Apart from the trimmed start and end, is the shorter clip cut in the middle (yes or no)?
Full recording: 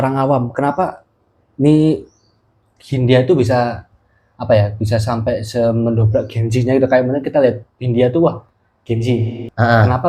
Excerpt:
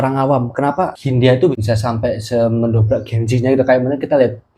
yes